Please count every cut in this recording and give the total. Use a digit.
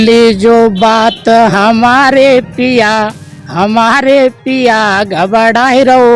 0